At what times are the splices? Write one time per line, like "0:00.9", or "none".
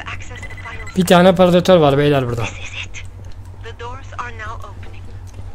none